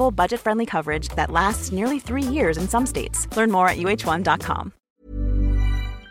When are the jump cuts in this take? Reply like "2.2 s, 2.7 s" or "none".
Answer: 4.8 s